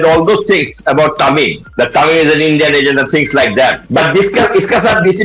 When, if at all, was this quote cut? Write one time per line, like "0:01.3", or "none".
0:01.6
0:03.8

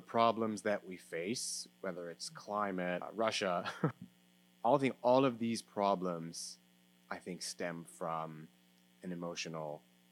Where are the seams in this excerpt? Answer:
0:03.1
0:04.0

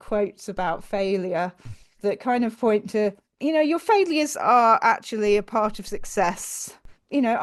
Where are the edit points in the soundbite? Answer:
none

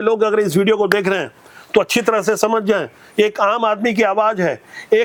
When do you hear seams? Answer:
none

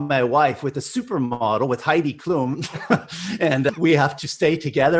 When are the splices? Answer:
none

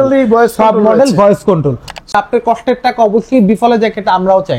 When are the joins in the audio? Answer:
0:02.1

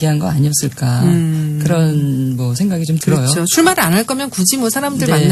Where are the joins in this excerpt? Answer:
0:02.8

